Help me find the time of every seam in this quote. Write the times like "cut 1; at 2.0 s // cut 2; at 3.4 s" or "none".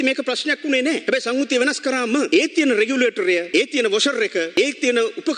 cut 1; at 1.0 s // cut 2; at 2.3 s // cut 3; at 3.5 s // cut 4; at 4.5 s